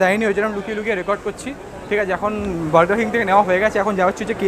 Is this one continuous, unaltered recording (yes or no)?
yes